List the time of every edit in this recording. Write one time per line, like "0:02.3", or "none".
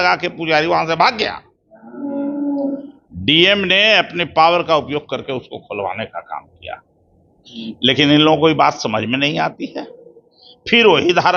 none

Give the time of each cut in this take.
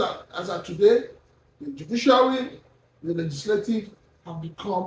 none

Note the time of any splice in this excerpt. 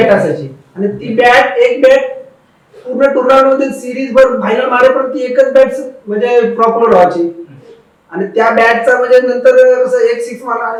none

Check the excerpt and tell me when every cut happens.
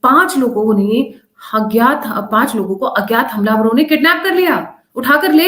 none

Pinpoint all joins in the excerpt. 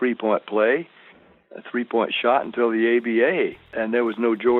0:03.7

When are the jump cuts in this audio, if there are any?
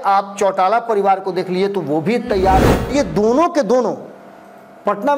0:02.9

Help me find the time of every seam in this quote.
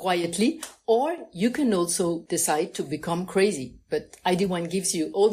0:02.2

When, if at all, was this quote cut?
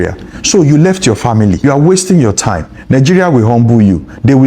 0:01.6

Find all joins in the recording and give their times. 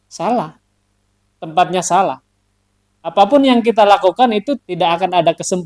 0:04.5

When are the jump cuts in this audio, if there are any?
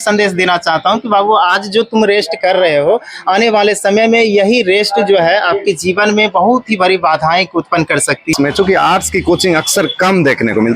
0:08.3

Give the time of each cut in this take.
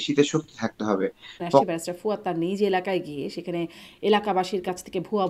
0:01.6

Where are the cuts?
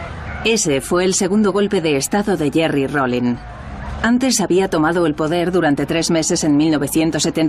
0:04.5

